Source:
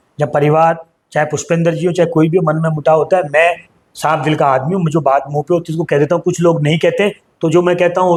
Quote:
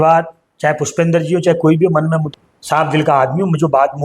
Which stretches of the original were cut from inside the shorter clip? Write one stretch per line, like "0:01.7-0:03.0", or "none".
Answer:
0:02.8-0:03.6